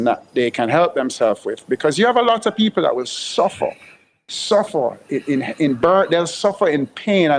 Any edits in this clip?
no; 0 cuts

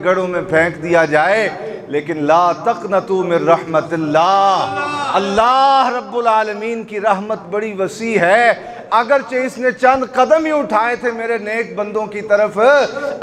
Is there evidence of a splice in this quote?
no; 0 cuts

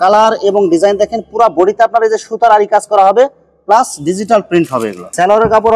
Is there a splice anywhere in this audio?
no; 0 cuts

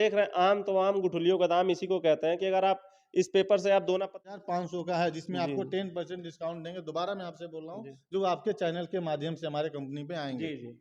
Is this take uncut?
no; 1 cut; at 4.1 s

